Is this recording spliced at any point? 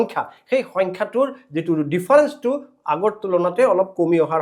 no; 0 cuts

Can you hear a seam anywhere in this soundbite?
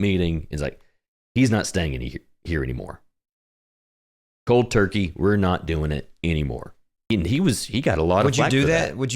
yes; 1 cut; at 7.0 s

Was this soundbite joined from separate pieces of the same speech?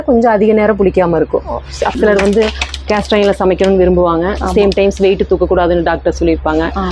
yes; 1 cut; at 1.9 s

